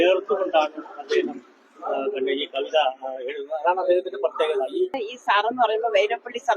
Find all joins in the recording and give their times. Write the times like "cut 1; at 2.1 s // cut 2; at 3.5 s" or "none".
cut 1; at 5.1 s

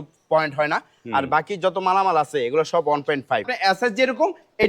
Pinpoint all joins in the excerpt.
cut 1; at 3.5 s

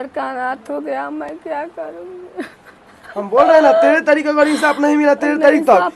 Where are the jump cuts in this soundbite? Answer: none

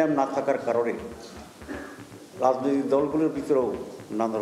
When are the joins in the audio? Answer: none

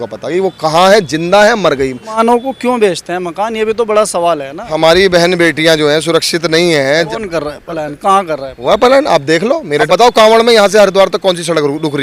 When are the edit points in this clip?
cut 1; at 2.2 s // cut 2; at 4.7 s // cut 3; at 7.1 s // cut 4; at 9.8 s

